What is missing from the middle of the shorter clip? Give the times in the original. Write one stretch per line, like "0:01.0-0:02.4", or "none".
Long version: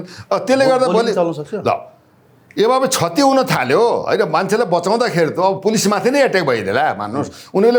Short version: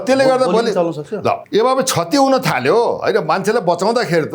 0:01.8-0:02.5